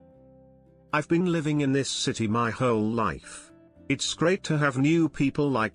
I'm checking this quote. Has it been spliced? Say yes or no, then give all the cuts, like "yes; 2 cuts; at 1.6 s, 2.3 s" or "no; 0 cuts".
yes; 1 cut; at 0.9 s